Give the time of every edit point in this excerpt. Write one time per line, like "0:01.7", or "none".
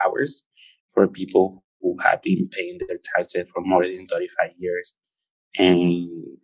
none